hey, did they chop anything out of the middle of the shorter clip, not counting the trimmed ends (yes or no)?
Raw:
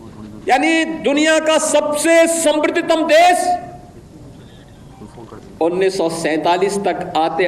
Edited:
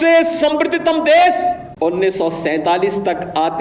yes